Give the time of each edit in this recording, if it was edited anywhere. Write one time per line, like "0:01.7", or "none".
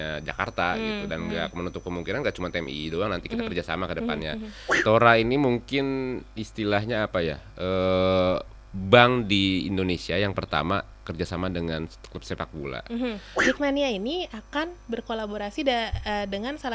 0:04.7
0:13.3